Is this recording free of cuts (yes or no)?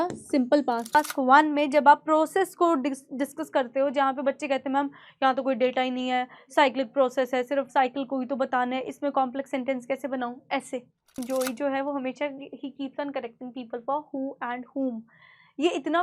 no